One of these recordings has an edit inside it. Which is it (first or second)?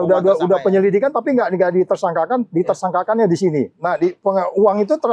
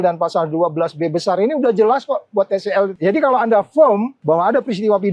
second